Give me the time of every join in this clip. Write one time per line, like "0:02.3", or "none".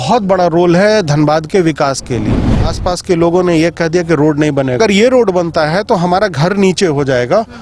0:02.7
0:04.8

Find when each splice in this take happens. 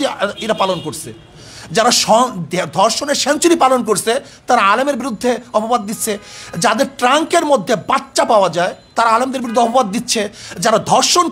none

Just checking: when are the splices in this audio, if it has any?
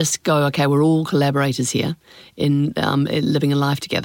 none

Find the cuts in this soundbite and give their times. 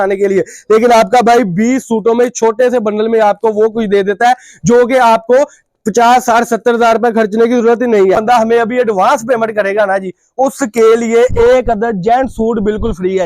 0:08.2

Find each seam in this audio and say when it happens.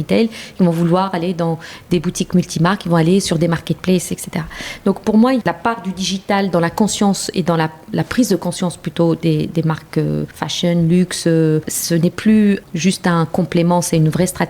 0:05.4
0:10.4
0:11.7
0:12.6

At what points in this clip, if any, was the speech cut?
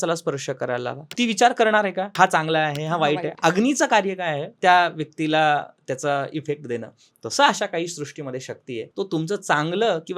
0:01.0
0:02.1
0:04.5
0:08.9

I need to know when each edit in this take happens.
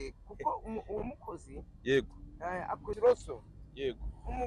0:03.0

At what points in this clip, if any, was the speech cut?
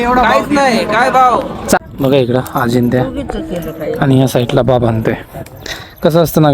0:01.8

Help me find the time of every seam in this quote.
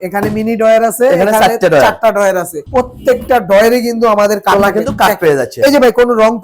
none

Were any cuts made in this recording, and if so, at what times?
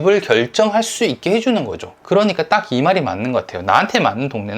0:01.9

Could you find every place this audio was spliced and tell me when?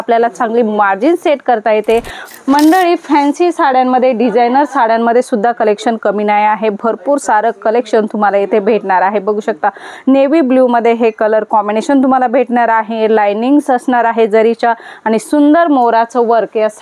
0:02.2

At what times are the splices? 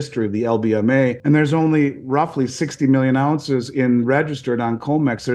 0:01.2

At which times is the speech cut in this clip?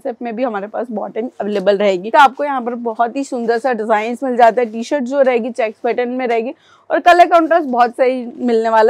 0:02.1

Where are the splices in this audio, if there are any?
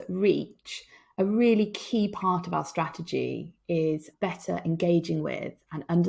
0:04.1

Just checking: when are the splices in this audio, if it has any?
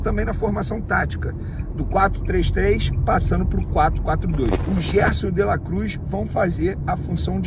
0:04.6

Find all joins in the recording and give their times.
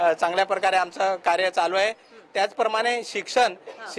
none

